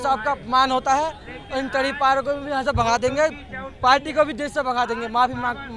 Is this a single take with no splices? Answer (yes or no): yes